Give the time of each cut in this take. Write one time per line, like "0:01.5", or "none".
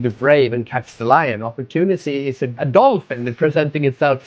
0:02.6